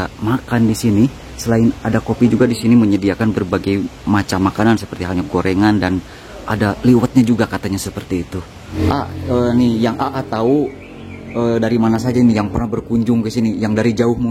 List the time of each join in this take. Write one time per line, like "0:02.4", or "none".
0:08.7